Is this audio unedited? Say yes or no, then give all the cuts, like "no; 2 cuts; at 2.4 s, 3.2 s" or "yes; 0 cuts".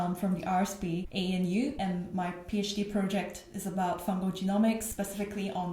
no; 3 cuts; at 1.1 s, 1.8 s, 4.9 s